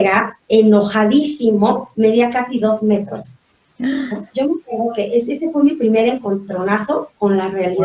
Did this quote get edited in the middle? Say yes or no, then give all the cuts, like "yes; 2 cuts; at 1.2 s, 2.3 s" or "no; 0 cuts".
no; 0 cuts